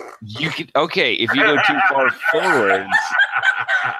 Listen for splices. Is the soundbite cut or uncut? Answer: uncut